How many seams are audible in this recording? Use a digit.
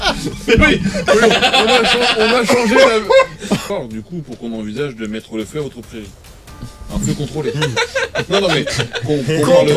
1